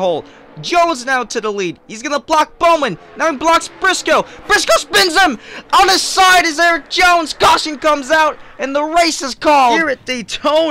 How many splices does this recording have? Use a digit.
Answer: 1